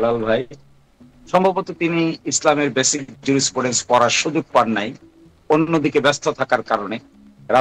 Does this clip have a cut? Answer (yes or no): no